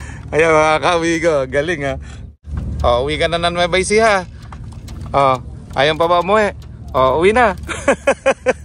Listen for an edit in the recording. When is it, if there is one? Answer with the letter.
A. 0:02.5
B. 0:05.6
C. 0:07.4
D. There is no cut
A